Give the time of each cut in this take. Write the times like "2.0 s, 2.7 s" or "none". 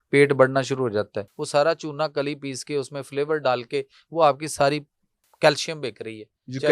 1.3 s